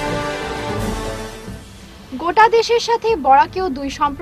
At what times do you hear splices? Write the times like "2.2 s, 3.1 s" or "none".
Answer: none